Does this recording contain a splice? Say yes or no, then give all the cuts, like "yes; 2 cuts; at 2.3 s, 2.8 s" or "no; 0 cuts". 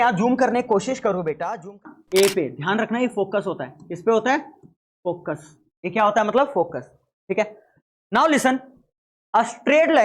yes; 1 cut; at 1.9 s